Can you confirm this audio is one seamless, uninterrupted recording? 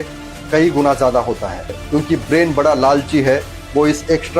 no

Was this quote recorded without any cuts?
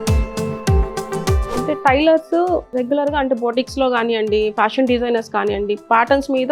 no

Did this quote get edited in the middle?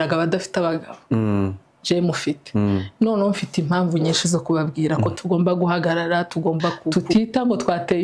yes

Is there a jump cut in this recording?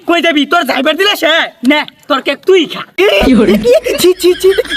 no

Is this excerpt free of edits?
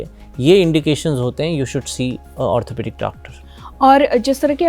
yes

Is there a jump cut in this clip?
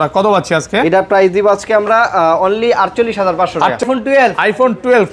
yes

